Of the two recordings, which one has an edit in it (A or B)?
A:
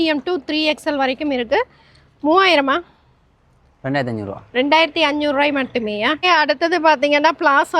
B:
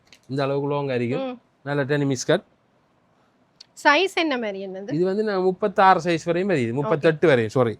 A